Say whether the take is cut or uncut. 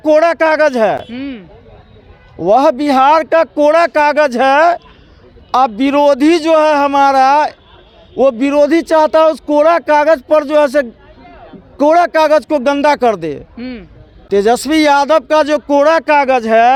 uncut